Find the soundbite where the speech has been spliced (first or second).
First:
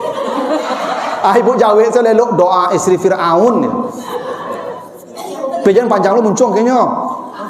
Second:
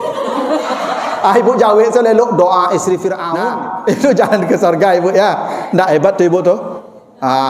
second